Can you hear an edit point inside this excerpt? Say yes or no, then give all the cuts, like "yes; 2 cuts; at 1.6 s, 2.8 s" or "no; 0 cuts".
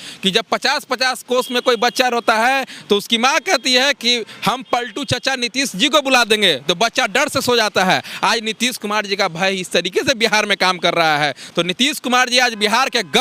no; 0 cuts